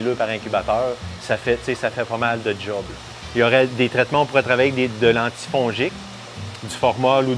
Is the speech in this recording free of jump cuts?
yes; 0 cuts

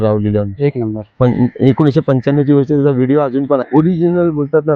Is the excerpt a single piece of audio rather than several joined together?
no; 1 cut; at 3.7 s

